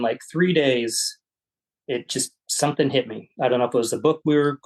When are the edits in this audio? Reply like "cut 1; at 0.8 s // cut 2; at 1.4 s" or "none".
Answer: none